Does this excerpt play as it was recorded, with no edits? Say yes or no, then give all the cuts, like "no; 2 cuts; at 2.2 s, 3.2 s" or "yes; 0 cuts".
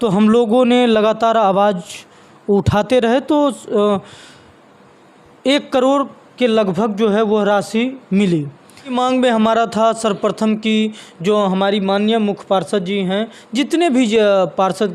no; 1 cut; at 8.9 s